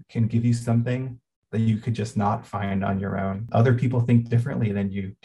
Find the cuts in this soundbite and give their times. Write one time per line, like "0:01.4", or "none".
0:03.4